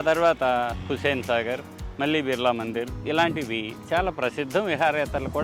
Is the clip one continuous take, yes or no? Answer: yes